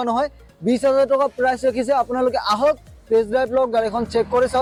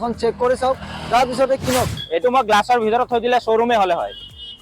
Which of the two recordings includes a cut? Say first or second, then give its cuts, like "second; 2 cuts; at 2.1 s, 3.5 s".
second; 1 cut; at 2.0 s